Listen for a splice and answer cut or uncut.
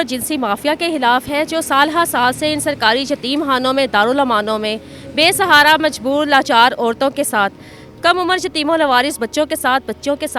uncut